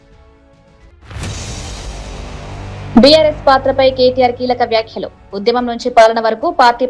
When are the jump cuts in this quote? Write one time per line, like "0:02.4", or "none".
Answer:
0:00.9
0:02.8